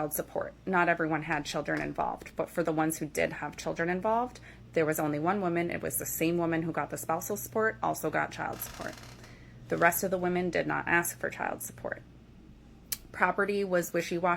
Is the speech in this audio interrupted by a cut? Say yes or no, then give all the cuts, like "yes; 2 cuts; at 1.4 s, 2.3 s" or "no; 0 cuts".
yes; 2 cuts; at 2.3 s, 9.2 s